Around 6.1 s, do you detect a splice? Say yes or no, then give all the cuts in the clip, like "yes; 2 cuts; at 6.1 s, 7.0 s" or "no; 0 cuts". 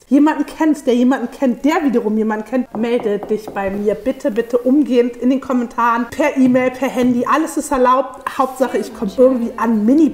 yes; 2 cuts; at 2.6 s, 6.1 s